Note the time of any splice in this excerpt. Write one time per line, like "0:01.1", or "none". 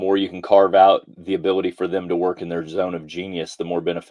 0:01.1